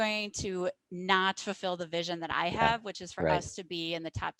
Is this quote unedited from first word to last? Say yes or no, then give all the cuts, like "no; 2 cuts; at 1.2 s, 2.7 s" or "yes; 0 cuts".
yes; 0 cuts